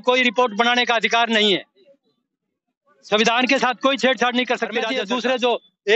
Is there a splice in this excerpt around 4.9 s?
yes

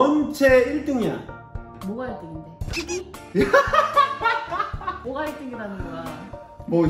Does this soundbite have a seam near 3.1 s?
no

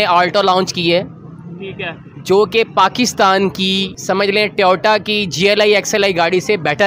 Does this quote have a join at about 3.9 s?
yes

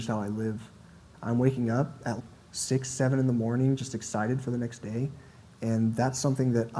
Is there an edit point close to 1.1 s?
yes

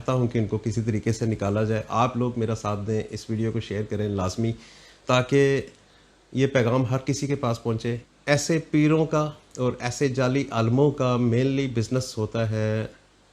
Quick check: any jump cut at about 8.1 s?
yes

